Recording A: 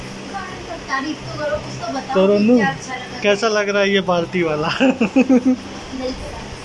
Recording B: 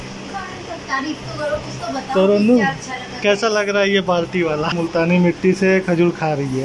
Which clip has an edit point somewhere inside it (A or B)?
B